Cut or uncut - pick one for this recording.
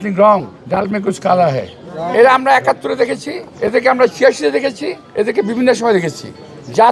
cut